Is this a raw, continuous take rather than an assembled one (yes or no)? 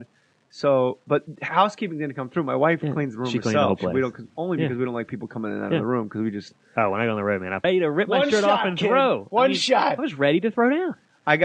yes